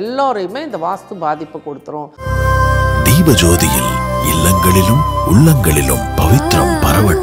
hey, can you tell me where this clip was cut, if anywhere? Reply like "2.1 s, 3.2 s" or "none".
2.1 s